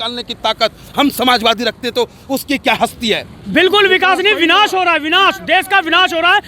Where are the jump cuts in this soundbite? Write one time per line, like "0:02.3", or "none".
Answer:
0:03.3